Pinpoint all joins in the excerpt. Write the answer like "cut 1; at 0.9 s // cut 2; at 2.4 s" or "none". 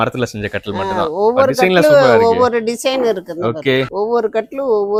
none